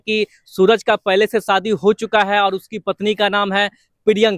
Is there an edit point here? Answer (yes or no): no